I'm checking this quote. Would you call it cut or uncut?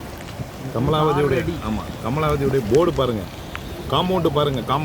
uncut